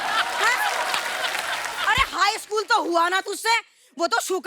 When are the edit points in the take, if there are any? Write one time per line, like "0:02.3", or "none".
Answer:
0:01.7